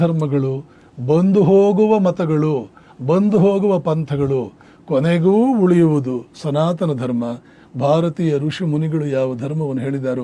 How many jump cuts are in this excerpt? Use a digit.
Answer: 0